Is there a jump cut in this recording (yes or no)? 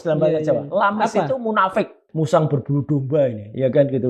yes